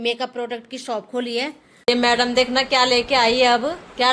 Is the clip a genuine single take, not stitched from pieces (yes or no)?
yes